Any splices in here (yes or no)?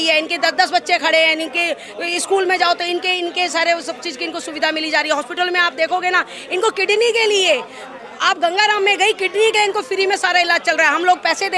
no